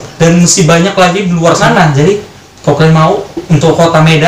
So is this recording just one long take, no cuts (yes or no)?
no